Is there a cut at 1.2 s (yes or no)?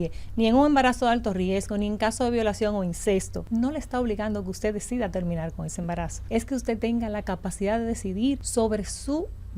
no